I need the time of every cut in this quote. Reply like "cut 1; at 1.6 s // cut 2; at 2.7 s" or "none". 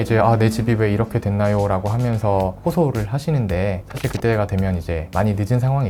none